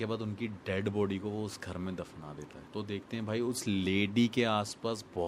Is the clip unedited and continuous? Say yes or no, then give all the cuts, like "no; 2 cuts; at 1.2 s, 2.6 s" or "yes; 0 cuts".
no; 1 cut; at 2.5 s